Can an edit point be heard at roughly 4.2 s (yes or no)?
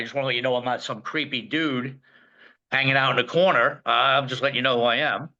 no